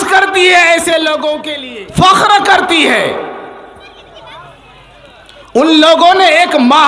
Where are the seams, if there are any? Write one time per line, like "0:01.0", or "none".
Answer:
0:01.5